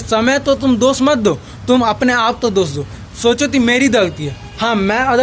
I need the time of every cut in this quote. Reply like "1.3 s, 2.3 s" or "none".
none